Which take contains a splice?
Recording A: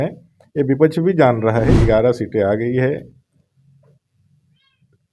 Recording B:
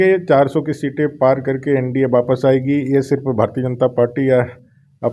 A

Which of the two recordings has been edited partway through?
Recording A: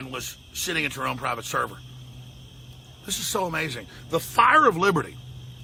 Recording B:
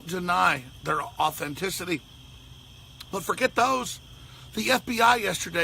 B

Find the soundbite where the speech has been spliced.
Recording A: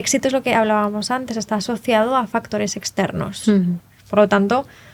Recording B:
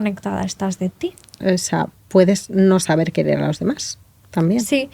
B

